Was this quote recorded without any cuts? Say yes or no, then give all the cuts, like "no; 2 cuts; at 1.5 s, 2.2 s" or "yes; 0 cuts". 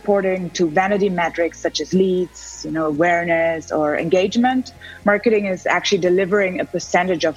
yes; 0 cuts